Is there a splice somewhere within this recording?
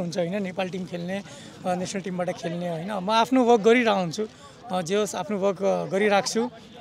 no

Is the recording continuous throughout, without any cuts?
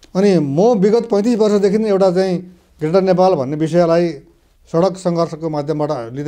yes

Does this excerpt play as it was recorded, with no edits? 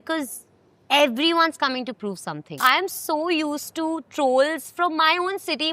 no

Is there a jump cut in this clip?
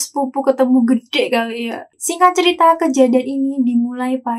yes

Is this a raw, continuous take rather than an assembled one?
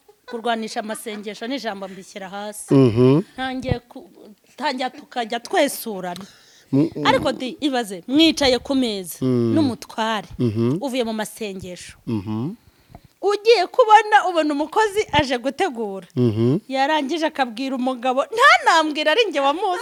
yes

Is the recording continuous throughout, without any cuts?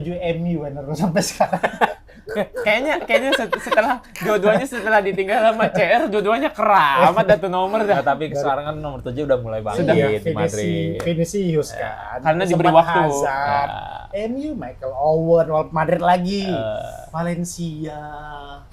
yes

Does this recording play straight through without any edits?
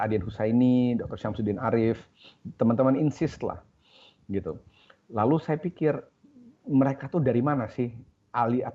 yes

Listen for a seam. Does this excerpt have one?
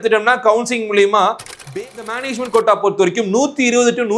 yes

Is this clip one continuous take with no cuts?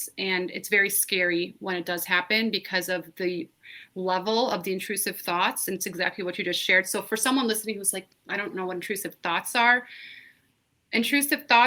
yes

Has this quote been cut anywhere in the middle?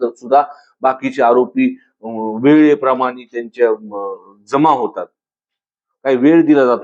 no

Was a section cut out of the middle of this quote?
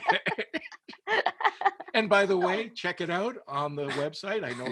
no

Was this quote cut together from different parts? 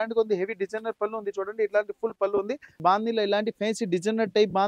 yes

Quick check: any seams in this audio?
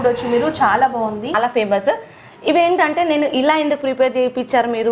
yes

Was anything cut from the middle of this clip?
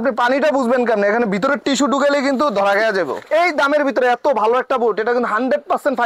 yes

